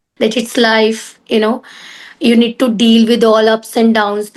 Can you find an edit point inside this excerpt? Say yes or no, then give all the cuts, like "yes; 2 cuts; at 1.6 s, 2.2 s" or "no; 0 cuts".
no; 0 cuts